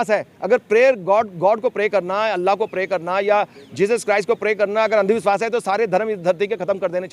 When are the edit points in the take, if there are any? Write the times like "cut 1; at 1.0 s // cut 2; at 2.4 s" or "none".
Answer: none